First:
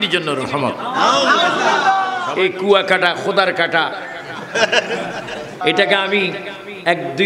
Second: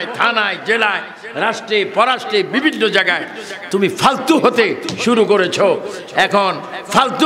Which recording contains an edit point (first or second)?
first